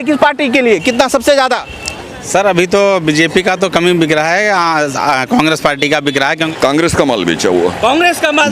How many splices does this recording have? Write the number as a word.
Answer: one